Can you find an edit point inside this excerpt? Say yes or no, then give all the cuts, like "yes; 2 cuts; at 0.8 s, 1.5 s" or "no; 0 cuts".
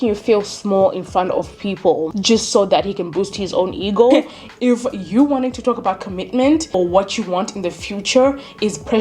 yes; 3 cuts; at 2.1 s, 4.1 s, 6.8 s